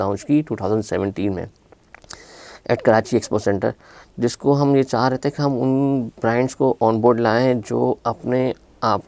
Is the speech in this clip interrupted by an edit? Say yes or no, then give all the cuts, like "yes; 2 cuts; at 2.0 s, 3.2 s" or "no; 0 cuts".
no; 0 cuts